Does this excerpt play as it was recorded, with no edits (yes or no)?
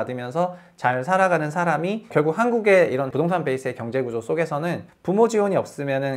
no